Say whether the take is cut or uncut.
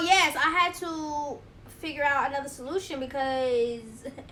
uncut